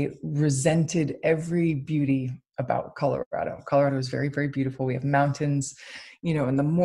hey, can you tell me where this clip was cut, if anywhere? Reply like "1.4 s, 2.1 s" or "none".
none